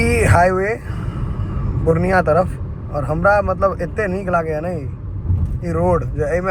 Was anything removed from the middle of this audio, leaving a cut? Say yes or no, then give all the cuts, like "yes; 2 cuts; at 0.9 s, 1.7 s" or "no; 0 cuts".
no; 0 cuts